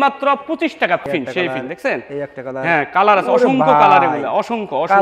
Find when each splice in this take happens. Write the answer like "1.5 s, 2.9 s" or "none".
1.1 s